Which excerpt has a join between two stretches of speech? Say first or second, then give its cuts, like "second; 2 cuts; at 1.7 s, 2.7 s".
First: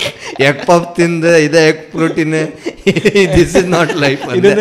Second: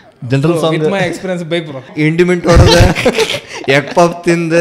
second; 1 cut; at 1.9 s